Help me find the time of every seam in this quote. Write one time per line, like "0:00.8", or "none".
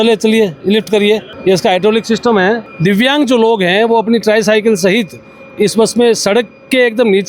0:01.3
0:02.7